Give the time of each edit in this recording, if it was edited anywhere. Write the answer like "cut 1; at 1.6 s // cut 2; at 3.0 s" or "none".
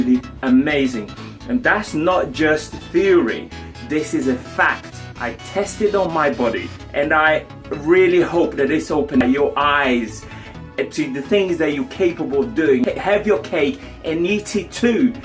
cut 1; at 6.8 s // cut 2; at 9.2 s // cut 3; at 12.8 s

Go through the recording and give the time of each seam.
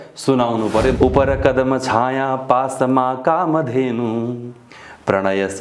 cut 1; at 1.0 s

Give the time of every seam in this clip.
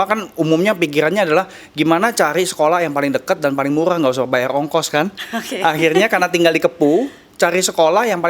none

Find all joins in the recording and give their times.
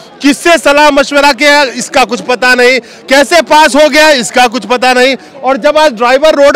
none

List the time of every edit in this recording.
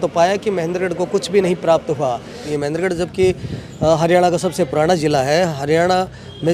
cut 1; at 2.5 s

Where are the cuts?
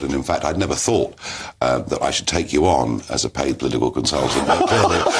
none

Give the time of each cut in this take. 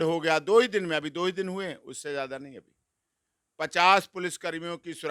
none

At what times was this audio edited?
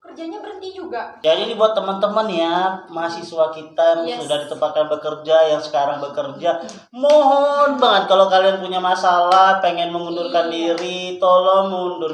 cut 1; at 1.1 s

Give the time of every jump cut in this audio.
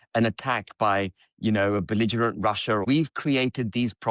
cut 1; at 2.9 s

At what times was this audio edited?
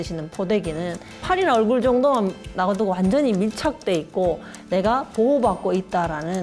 cut 1; at 1.2 s // cut 2; at 4.5 s

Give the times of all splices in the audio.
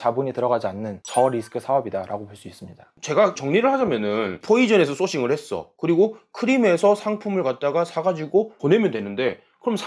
none

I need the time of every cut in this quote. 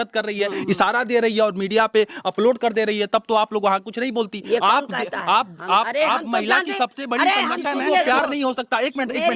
cut 1; at 8.0 s

